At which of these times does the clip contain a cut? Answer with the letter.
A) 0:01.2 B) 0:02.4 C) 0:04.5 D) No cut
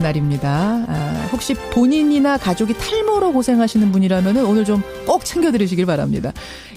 B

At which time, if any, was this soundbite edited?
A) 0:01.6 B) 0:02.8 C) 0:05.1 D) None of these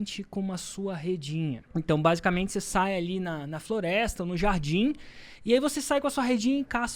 A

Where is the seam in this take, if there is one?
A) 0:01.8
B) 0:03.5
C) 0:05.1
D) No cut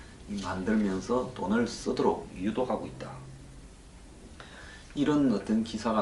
B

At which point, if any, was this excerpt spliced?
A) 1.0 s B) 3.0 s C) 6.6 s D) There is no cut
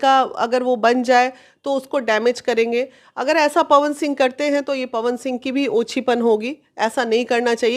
D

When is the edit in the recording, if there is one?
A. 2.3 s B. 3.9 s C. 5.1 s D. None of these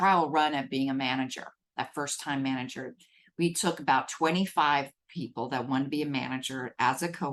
D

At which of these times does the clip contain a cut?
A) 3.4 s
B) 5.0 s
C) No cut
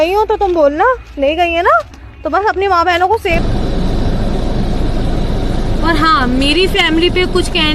A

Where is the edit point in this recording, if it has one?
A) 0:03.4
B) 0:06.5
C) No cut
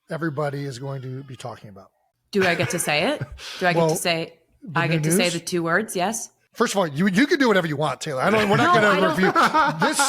B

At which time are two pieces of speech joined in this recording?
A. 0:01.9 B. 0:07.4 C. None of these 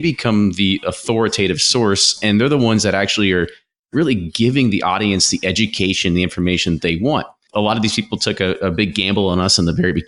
B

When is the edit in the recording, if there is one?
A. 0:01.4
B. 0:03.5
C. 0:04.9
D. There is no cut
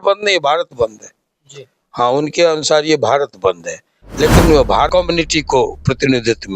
C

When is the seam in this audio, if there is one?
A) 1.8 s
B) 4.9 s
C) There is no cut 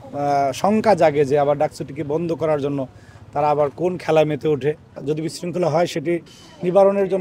B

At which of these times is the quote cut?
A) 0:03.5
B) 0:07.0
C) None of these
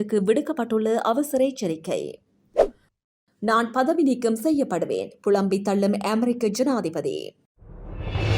B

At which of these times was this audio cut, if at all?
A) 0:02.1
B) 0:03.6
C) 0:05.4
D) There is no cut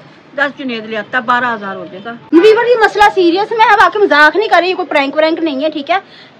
A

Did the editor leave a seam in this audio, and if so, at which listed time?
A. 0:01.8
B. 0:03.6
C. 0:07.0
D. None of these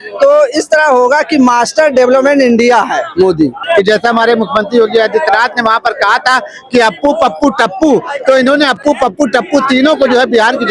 B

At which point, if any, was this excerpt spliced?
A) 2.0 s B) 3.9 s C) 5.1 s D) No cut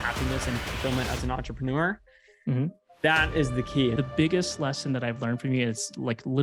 B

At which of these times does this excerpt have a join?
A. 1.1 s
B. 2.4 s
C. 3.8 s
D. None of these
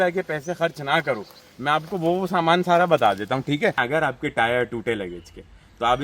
C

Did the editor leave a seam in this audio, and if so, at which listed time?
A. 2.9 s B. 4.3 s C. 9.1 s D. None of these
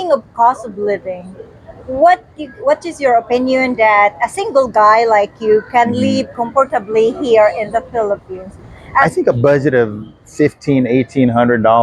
C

